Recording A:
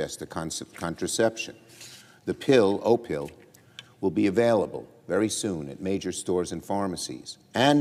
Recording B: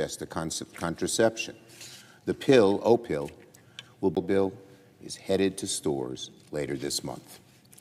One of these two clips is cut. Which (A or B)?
A